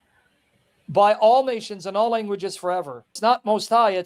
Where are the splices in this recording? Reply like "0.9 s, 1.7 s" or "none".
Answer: 3.1 s